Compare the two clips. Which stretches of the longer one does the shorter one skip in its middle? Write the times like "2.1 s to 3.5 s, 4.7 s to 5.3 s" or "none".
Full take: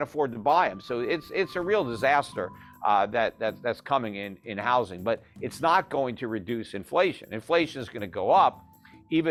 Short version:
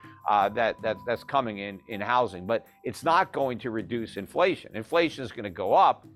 none